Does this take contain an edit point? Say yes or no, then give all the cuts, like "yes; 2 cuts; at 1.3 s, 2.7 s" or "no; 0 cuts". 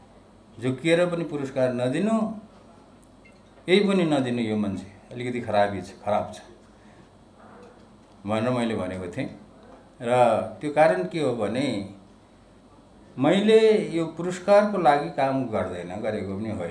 no; 0 cuts